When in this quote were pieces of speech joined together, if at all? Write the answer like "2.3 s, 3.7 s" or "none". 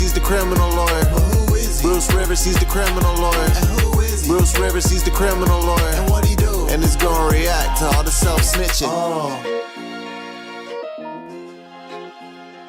none